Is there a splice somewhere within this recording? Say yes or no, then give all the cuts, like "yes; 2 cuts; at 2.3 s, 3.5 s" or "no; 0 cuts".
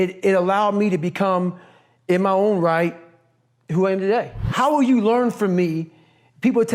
yes; 1 cut; at 4.4 s